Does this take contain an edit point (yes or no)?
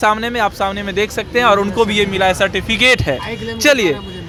no